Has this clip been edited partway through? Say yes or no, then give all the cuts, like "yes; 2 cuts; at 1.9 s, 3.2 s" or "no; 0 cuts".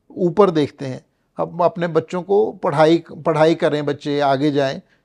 no; 0 cuts